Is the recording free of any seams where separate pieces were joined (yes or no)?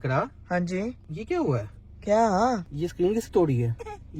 no